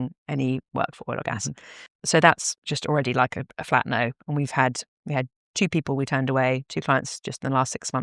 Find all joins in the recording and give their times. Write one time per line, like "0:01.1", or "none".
0:01.8